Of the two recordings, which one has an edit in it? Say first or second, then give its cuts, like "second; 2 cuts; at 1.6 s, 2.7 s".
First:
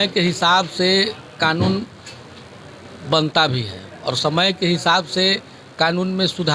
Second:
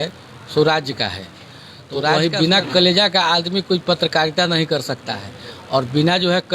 second; 1 cut; at 2.2 s